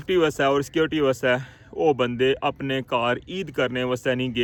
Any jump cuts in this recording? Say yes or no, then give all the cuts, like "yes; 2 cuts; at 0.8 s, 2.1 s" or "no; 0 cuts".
no; 0 cuts